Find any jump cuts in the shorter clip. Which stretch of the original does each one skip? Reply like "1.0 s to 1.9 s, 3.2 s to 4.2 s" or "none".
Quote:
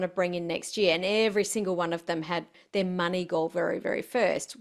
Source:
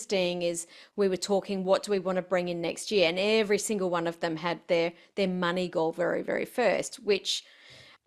4.6 s to 4.9 s